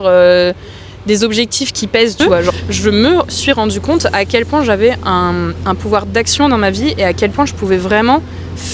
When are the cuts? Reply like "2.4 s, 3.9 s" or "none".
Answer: 2.5 s